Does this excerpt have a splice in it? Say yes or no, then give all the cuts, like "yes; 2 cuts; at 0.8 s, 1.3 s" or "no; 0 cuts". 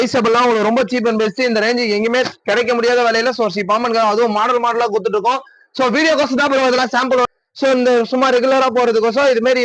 yes; 1 cut; at 7.2 s